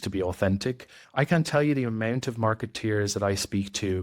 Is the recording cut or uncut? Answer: cut